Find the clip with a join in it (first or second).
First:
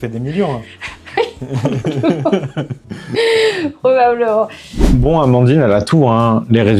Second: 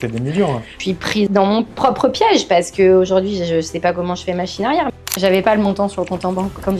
second